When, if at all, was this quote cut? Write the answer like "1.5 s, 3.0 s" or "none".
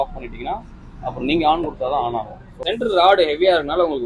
2.6 s

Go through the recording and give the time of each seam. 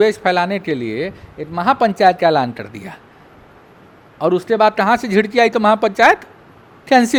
none

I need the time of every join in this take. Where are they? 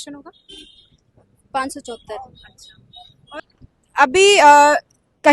3.4 s

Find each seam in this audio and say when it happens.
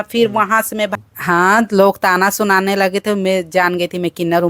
1.0 s

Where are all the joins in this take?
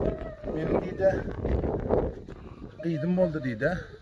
none

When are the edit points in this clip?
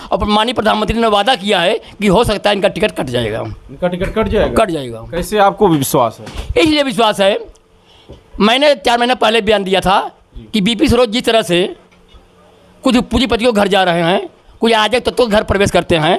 none

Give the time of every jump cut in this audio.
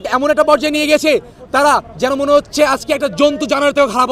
none

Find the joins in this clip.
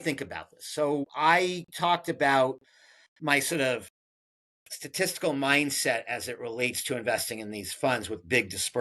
1.1 s

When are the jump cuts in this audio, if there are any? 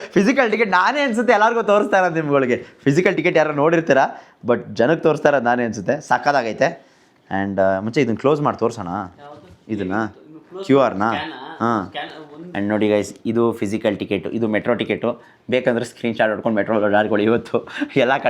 none

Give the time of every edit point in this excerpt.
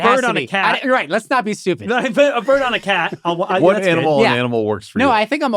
none

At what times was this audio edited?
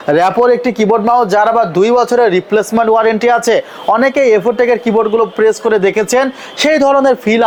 none

